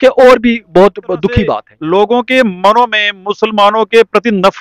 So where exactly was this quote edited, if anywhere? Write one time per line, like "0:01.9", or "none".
0:01.7